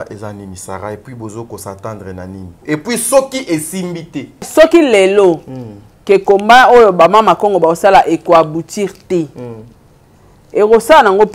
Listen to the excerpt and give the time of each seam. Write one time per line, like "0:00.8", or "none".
0:02.5
0:04.5